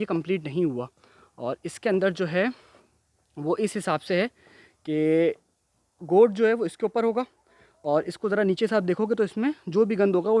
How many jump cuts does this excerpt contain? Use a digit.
0